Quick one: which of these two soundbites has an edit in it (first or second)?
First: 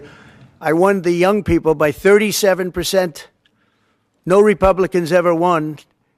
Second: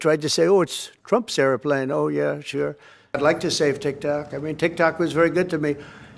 second